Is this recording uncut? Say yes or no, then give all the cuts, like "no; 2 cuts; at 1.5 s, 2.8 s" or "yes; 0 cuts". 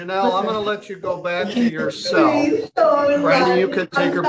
yes; 0 cuts